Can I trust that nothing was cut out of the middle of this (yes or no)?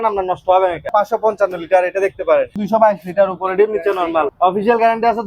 no